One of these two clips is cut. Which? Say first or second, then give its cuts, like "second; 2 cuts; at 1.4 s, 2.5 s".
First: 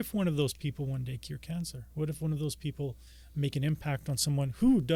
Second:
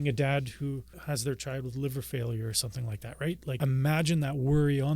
second; 2 cuts; at 0.9 s, 3.6 s